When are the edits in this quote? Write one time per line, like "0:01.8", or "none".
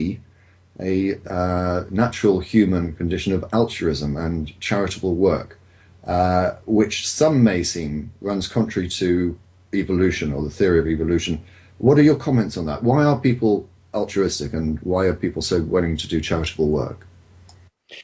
0:03.2